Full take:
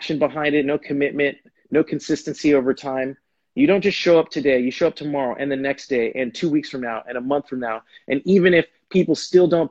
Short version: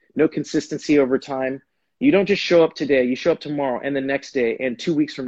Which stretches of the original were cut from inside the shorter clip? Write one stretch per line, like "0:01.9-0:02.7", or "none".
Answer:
none